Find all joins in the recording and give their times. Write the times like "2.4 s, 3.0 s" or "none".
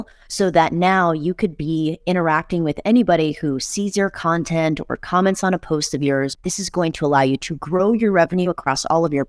6.4 s